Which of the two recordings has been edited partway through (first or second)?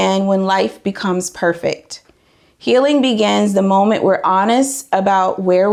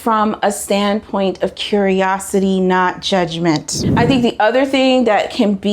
second